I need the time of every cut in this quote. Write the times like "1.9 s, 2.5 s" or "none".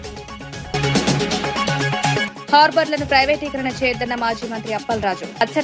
0.7 s, 2.4 s